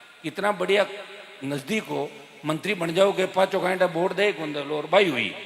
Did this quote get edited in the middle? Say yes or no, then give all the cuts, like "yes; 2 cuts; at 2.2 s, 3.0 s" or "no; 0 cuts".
no; 0 cuts